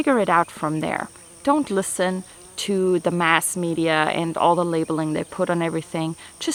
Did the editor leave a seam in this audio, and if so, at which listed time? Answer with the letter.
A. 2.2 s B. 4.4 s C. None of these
C